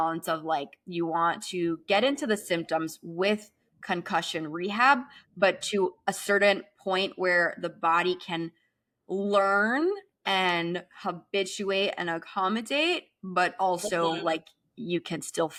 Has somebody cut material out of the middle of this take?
no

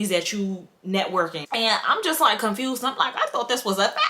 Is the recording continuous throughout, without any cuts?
no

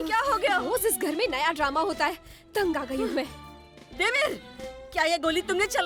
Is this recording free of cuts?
yes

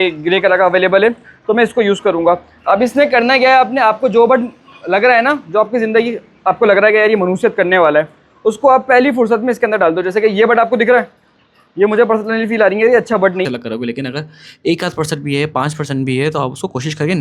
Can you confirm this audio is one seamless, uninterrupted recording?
no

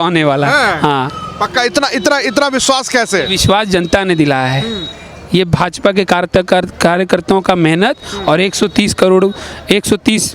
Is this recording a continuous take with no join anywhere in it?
yes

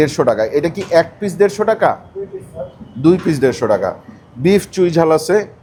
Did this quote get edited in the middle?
no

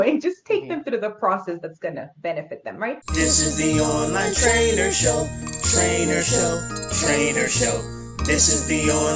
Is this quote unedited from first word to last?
no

